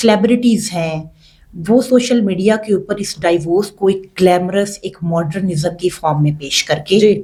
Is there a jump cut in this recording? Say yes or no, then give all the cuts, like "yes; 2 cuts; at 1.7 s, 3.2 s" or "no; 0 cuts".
no; 0 cuts